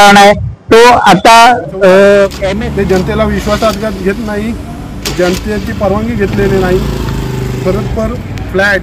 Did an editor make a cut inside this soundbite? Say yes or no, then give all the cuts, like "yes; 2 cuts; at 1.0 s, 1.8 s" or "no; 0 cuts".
yes; 1 cut; at 2.4 s